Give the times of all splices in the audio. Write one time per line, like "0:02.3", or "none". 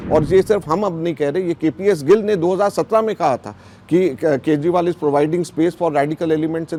none